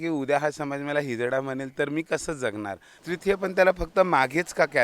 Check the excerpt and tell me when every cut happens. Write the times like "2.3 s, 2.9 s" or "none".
2.9 s